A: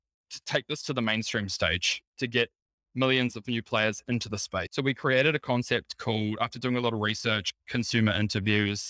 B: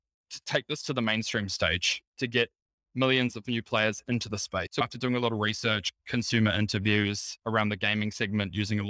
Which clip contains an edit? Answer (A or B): B